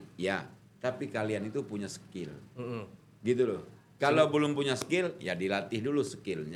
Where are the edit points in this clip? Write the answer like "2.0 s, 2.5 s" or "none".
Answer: none